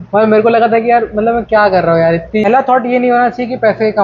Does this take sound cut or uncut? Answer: cut